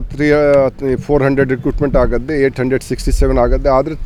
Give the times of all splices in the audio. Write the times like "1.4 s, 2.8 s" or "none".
none